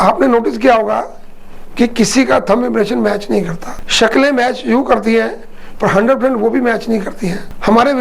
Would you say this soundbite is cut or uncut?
uncut